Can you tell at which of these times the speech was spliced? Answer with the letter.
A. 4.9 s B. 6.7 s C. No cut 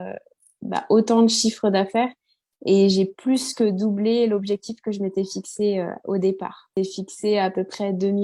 B